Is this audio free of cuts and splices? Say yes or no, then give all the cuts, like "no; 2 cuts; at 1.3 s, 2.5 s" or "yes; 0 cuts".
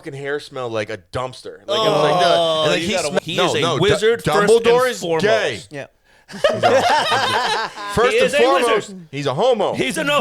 no; 1 cut; at 3.2 s